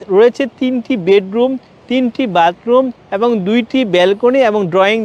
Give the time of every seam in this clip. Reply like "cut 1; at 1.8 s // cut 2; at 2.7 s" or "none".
none